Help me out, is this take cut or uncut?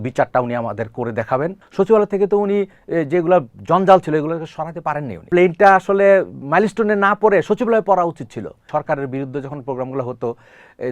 cut